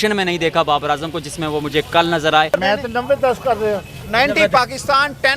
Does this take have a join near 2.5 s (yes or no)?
yes